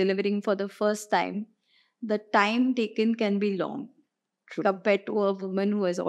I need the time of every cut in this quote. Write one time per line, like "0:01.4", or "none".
none